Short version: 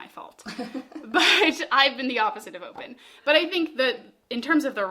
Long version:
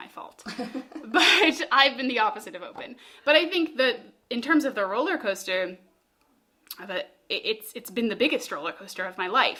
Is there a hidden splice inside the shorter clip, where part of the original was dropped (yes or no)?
no